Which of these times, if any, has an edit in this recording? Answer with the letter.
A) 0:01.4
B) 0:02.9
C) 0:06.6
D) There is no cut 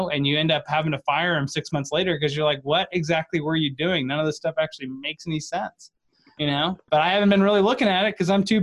C